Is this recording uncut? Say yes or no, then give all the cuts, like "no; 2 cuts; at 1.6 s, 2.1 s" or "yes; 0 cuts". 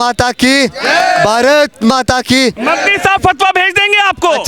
yes; 0 cuts